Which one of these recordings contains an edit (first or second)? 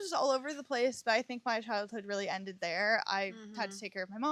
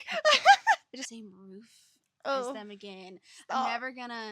second